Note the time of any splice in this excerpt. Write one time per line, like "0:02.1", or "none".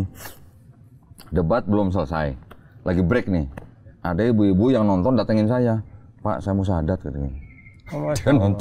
none